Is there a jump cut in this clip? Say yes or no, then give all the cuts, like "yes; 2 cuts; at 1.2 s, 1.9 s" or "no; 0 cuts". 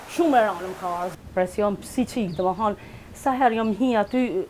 yes; 1 cut; at 1.2 s